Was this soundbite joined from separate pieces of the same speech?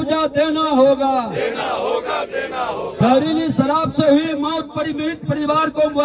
no; 0 cuts

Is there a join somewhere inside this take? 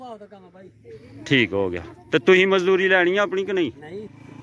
no; 0 cuts

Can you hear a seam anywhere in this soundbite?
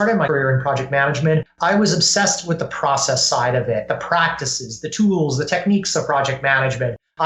yes; 1 cut; at 1.5 s

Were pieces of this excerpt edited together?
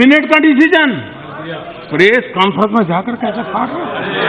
no; 0 cuts

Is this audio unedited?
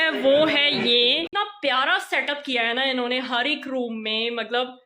no; 1 cut; at 1.3 s

